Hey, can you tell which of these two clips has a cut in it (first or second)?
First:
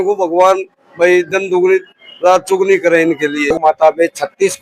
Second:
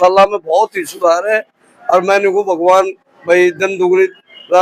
first